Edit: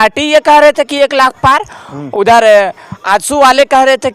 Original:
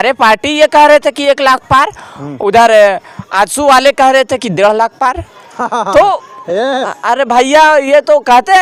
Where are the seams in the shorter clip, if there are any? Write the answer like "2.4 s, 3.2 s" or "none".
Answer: none

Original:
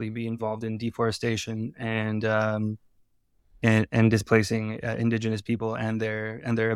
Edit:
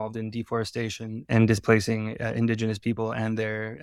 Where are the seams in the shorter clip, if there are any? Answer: 1.3 s

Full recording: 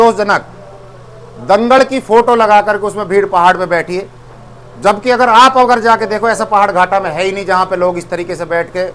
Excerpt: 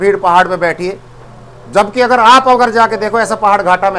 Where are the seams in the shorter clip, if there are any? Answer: none

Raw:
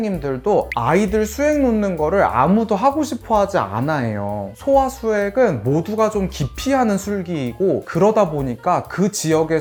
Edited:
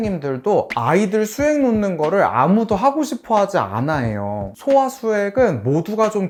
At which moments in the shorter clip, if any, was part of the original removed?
none

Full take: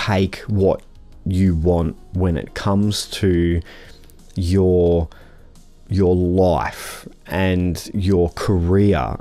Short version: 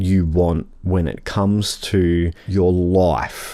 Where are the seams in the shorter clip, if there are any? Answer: 2.4 s

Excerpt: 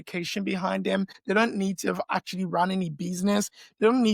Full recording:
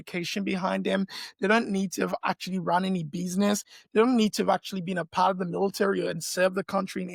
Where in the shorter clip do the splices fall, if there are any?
1.2 s

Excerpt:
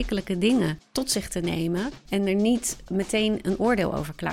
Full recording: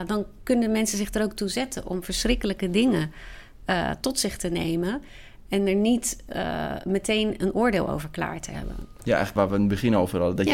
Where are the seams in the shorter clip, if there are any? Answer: 0.9 s, 2.0 s, 2.8 s

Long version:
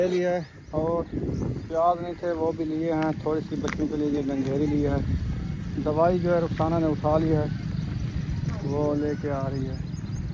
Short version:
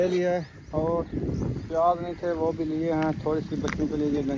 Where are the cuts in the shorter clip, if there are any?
none

